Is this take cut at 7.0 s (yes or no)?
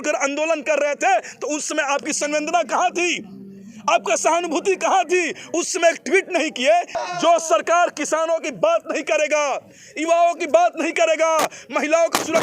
yes